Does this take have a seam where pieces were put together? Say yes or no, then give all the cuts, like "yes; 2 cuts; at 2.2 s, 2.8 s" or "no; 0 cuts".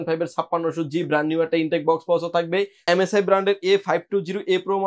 yes; 1 cut; at 2.8 s